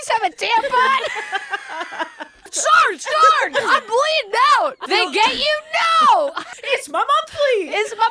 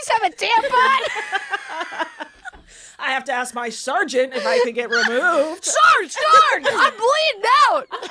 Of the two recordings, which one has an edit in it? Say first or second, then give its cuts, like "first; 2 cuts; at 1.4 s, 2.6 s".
first; 3 cuts; at 2.5 s, 4.8 s, 6.5 s